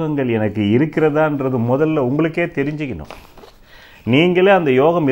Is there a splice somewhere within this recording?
no; 0 cuts

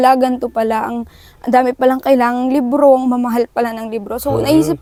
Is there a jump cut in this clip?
no; 0 cuts

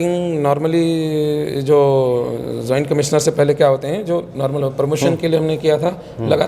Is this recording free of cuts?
yes; 0 cuts

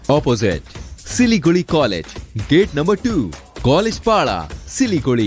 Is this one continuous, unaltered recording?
yes; 0 cuts

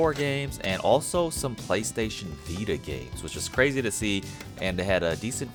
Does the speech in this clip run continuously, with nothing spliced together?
yes; 0 cuts

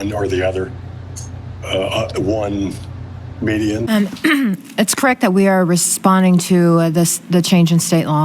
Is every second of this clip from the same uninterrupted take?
no; 1 cut; at 3.9 s

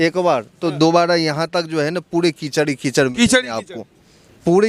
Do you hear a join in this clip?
no; 0 cuts

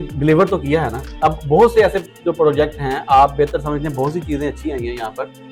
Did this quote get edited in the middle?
no; 0 cuts

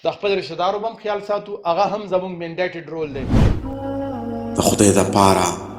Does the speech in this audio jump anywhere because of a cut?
yes; 1 cut; at 3.6 s

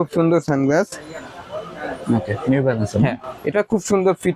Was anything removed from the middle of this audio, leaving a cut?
no; 0 cuts

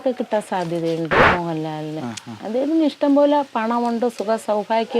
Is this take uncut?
no; 1 cut; at 1.3 s

